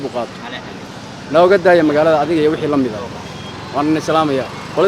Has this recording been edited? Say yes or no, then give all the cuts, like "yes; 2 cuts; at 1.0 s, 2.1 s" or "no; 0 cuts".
no; 0 cuts